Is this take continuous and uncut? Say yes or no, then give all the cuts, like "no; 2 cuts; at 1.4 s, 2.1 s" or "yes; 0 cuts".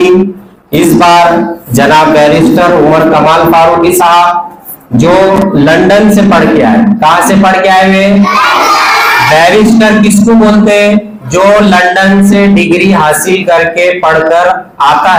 yes; 0 cuts